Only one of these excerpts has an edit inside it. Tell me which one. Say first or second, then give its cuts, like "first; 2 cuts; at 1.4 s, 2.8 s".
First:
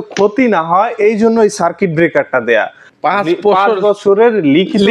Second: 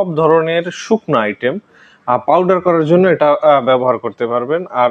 first; 1 cut; at 2.8 s